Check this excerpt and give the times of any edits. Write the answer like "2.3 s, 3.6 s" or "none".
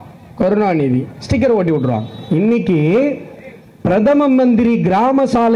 2.1 s